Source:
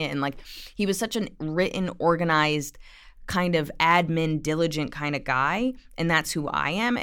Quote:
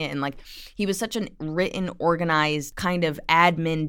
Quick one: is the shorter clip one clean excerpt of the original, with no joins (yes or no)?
no